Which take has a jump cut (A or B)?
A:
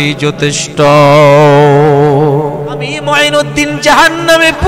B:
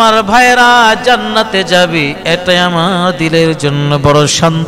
A